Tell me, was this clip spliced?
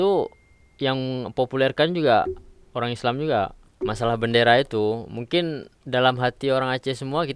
yes; 1 cut; at 3.6 s

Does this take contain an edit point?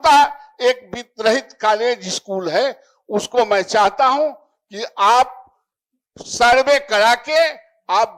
no; 0 cuts

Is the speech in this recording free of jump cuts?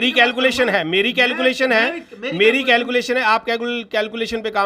yes; 0 cuts

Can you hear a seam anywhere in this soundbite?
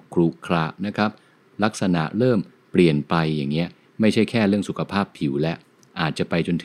no; 0 cuts

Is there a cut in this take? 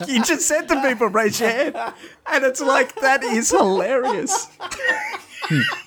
no; 0 cuts

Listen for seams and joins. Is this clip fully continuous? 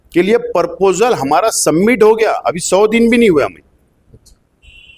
yes; 0 cuts

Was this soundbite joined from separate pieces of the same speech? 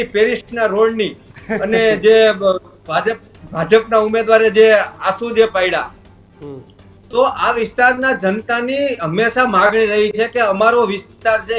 no; 0 cuts

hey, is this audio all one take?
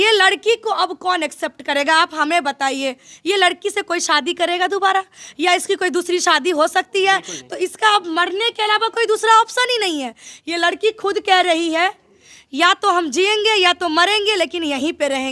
yes; 0 cuts

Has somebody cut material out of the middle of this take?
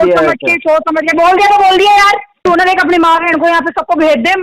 yes; 1 cut; at 2.4 s

